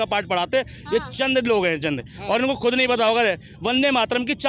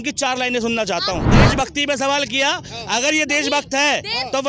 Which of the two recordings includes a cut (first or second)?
second